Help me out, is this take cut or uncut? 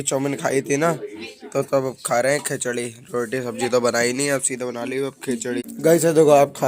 cut